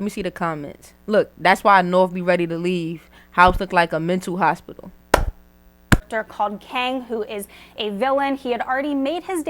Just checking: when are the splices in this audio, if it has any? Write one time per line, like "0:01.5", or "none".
0:06.1